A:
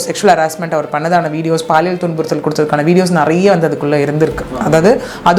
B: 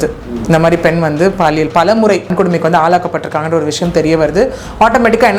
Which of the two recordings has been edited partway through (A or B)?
B